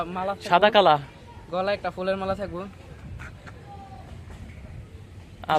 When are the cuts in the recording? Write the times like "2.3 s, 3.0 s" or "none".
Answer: none

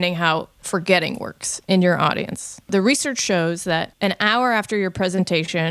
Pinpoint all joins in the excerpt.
2.7 s, 3.9 s

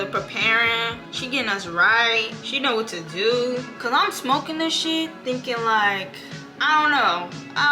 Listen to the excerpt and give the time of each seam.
1.1 s, 2.4 s, 3.7 s

